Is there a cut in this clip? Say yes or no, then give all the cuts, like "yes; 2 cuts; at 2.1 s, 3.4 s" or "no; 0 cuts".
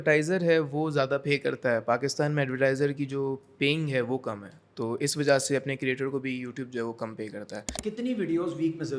yes; 1 cut; at 7.8 s